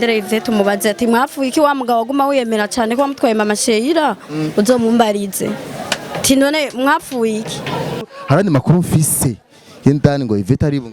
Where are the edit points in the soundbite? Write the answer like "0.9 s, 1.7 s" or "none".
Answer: 8.0 s